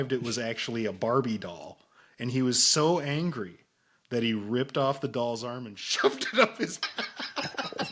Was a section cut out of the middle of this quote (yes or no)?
yes